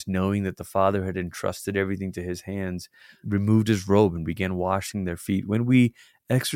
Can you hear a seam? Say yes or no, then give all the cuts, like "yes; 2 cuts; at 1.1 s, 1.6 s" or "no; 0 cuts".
yes; 1 cut; at 3.1 s